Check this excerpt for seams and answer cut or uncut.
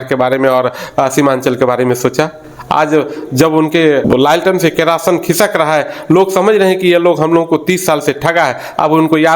uncut